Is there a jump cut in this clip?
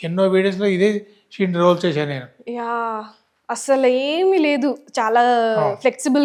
no; 0 cuts

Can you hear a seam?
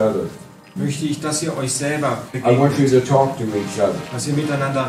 no; 0 cuts

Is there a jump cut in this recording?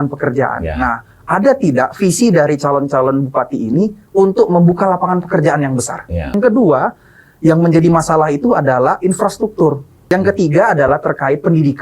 yes; 2 cuts; at 6.3 s, 10.0 s

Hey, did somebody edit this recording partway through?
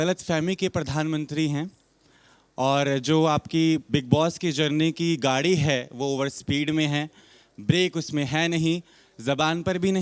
no; 0 cuts

